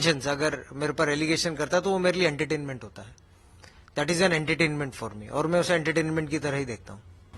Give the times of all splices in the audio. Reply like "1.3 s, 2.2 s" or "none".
none